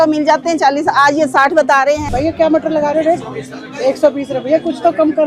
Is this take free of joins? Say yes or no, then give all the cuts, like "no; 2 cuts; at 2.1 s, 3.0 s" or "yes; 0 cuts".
no; 1 cut; at 2.0 s